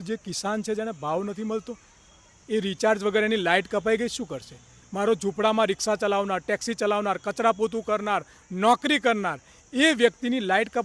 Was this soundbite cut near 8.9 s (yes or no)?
no